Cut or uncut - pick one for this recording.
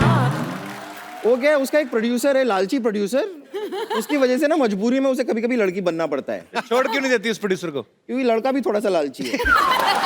uncut